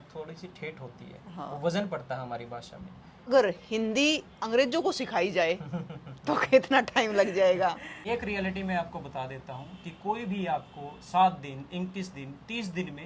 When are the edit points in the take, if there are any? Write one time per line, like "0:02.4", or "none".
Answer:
0:03.3
0:07.9